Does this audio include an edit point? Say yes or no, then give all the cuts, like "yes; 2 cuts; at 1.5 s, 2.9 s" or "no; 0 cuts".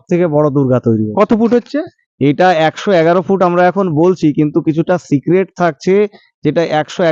no; 0 cuts